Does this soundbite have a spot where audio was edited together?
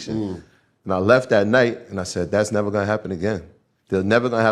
no; 0 cuts

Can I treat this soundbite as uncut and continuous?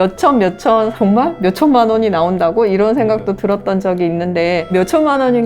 no; 2 cuts; at 0.9 s, 4.7 s

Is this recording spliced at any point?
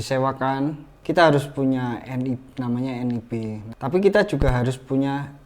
yes; 2 cuts; at 0.9 s, 3.6 s

